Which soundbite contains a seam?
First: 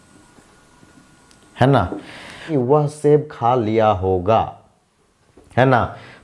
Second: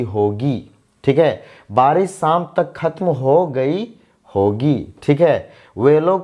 first; 1 cut; at 2.5 s

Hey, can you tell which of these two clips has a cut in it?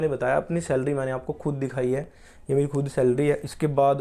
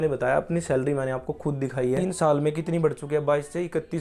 second; 1 cut; at 2.0 s

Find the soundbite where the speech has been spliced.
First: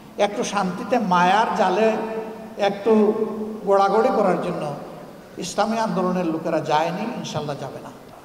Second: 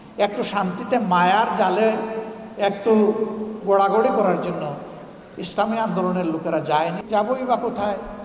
second; 1 cut; at 7.0 s

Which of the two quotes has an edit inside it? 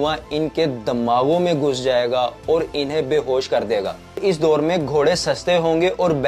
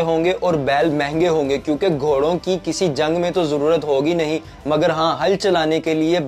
first; 1 cut; at 4.2 s

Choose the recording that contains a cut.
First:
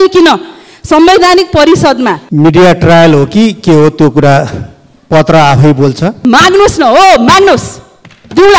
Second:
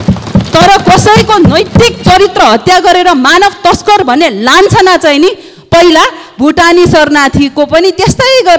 first; 2 cuts; at 2.2 s, 6.2 s

